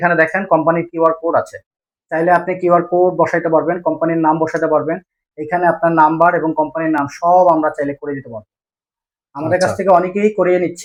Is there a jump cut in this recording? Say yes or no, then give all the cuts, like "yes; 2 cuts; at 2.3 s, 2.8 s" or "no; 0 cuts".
no; 0 cuts